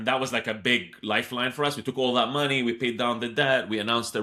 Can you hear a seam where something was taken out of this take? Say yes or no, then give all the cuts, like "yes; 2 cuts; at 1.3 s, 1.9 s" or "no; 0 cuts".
no; 0 cuts